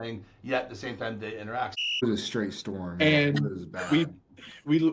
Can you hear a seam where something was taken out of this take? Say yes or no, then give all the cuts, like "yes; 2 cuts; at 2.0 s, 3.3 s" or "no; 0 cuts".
yes; 1 cut; at 2.0 s